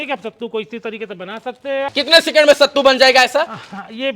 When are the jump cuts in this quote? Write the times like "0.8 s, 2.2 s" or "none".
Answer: 1.9 s